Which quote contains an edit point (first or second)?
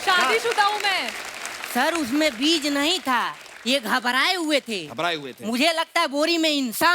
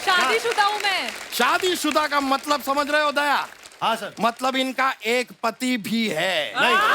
first